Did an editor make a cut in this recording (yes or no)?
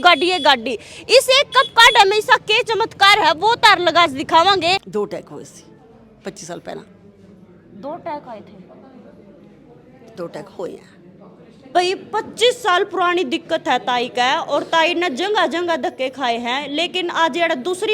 yes